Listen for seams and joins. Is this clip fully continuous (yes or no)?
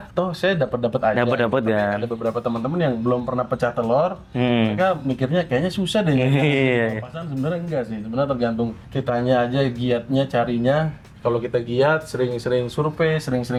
yes